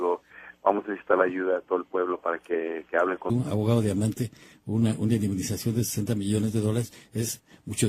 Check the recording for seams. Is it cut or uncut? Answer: uncut